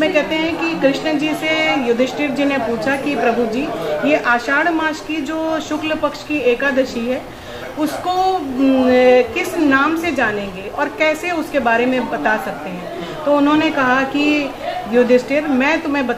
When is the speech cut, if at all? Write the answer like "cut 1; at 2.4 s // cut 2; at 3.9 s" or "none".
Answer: none